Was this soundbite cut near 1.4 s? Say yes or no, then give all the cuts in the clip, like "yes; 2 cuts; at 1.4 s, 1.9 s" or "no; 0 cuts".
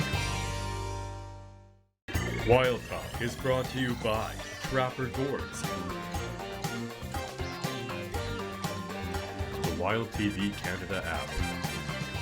yes; 1 cut; at 1.4 s